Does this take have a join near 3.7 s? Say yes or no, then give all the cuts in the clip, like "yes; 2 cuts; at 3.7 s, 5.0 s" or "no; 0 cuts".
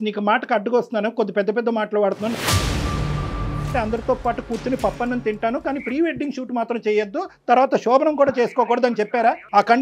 yes; 1 cut; at 3.7 s